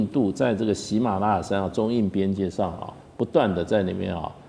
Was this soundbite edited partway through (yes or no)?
no